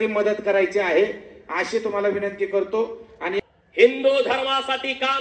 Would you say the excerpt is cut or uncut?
cut